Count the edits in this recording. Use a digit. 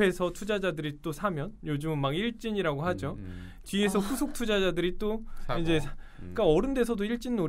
0